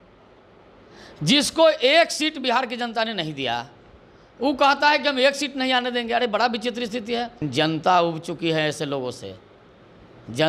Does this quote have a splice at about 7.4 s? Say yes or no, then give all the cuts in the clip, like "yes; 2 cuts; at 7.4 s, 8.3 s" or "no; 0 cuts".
yes; 1 cut; at 7.4 s